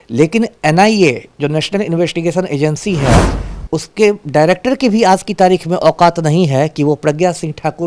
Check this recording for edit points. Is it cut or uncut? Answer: uncut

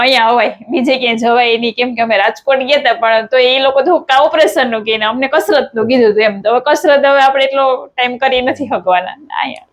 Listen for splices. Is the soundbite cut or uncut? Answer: uncut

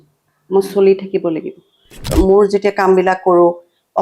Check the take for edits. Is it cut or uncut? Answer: cut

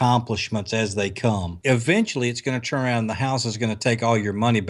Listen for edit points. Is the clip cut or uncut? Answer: cut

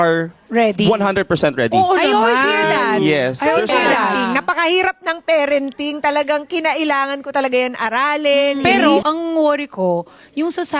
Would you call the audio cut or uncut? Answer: cut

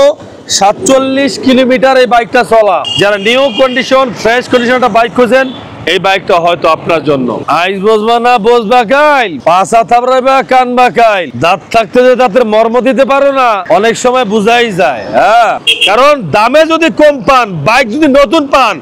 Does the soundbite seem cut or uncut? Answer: cut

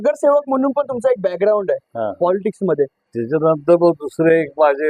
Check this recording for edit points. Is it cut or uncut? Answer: cut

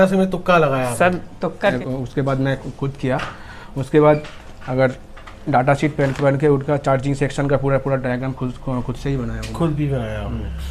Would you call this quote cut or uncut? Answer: cut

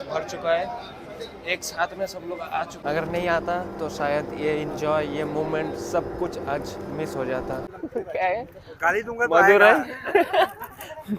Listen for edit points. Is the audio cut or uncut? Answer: cut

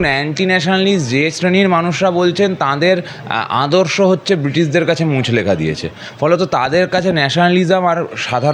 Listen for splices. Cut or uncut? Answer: uncut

